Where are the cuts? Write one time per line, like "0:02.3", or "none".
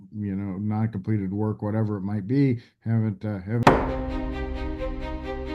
0:03.6